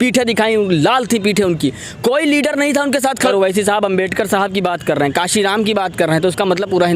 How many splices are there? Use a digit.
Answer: 1